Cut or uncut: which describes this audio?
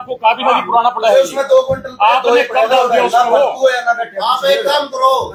uncut